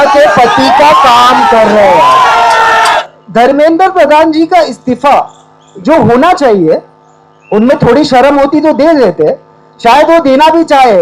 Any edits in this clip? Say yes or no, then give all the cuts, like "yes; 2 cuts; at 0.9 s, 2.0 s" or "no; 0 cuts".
yes; 1 cut; at 3.0 s